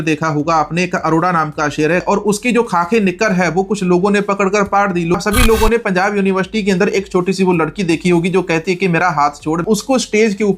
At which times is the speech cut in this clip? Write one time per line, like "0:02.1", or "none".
0:02.0
0:05.1
0:09.6